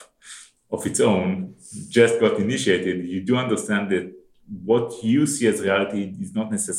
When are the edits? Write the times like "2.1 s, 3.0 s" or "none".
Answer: none